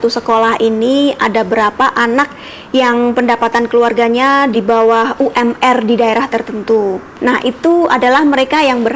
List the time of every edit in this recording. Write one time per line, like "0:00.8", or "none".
0:04.5
0:07.1